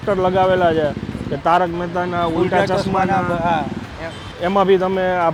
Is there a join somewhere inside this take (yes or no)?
no